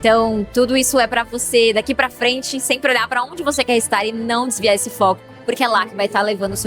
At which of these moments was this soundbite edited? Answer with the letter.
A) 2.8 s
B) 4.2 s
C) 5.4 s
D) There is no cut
D